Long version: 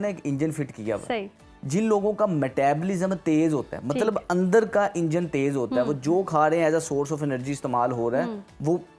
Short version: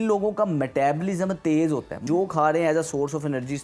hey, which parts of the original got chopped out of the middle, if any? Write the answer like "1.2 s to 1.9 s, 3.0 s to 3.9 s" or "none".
3.8 s to 6.0 s